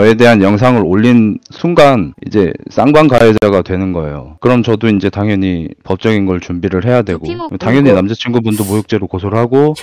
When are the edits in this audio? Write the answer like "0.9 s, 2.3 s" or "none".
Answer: 7.4 s